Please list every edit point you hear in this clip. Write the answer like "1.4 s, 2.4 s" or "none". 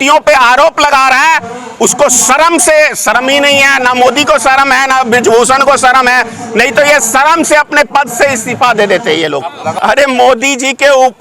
9.7 s